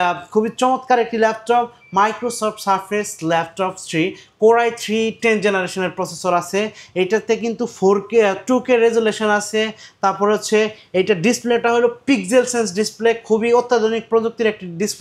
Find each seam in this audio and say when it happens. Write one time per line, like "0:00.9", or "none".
none